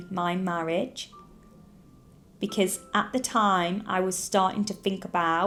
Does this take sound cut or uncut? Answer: uncut